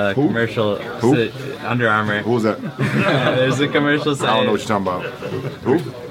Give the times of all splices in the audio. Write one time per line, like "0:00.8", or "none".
none